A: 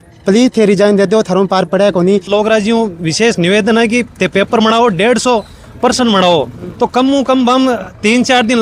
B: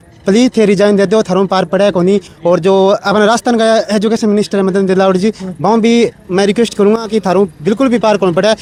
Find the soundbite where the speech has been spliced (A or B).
A